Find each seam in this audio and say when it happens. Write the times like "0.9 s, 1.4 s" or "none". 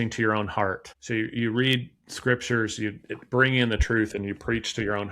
0.9 s